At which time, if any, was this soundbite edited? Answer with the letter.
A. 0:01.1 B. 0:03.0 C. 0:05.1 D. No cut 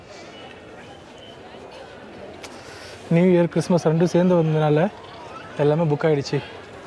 D